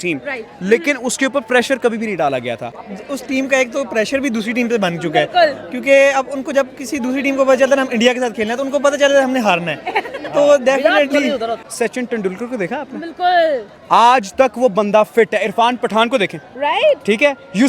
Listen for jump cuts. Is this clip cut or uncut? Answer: cut